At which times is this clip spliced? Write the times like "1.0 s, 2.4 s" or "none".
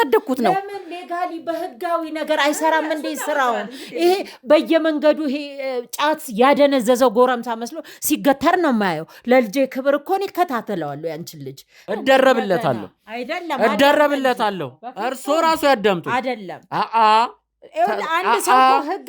11.8 s